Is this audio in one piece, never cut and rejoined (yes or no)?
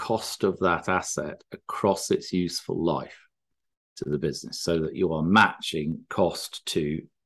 yes